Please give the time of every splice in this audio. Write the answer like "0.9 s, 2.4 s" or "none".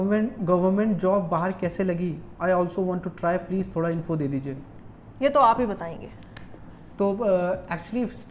none